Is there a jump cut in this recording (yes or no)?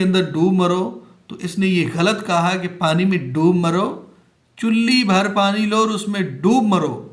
no